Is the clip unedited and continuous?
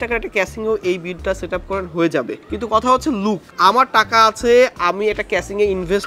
no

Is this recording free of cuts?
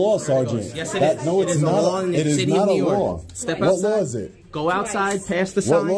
yes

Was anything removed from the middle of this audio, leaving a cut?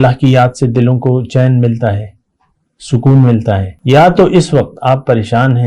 yes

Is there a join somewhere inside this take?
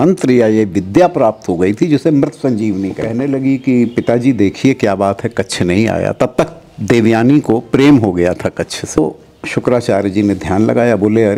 yes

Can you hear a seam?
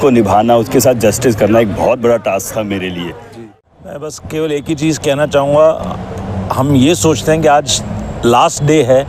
yes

